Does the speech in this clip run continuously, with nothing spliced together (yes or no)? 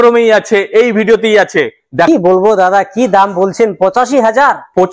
no